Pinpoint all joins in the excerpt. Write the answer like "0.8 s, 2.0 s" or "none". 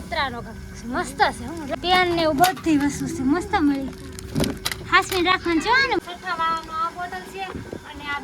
1.7 s, 6.0 s

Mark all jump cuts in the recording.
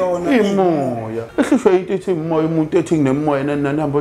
1.2 s

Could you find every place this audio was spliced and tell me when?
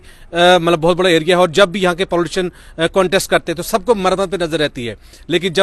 none

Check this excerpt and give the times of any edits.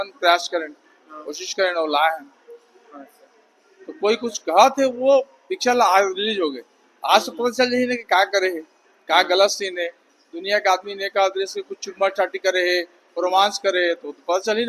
none

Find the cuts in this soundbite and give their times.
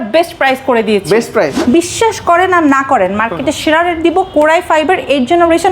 1.5 s

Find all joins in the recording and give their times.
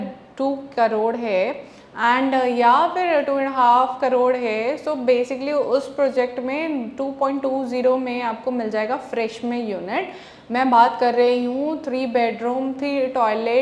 none

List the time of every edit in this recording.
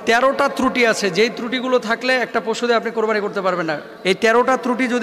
3.9 s

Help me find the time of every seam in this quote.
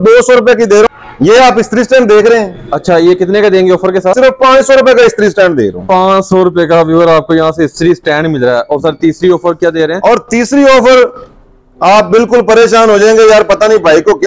0.9 s, 4.1 s

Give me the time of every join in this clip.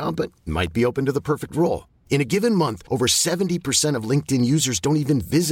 none

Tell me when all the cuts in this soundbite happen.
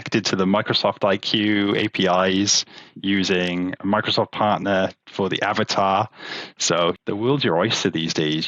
7.0 s

